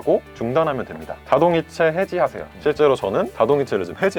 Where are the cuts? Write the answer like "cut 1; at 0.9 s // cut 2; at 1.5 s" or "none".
none